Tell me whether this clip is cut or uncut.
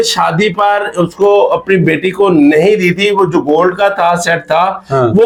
uncut